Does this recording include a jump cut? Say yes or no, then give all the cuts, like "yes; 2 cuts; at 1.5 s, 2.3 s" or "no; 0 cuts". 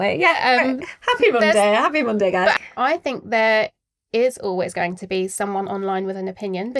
yes; 1 cut; at 2.6 s